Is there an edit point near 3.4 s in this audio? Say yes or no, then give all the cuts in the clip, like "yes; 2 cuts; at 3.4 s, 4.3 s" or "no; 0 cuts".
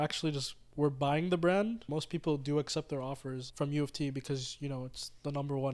yes; 2 cuts; at 1.9 s, 3.4 s